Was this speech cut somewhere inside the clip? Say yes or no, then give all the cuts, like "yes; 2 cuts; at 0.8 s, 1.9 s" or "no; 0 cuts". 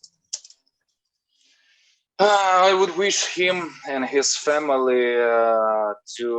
no; 0 cuts